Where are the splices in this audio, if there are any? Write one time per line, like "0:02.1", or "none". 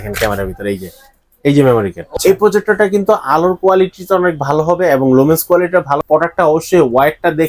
0:02.0
0:06.0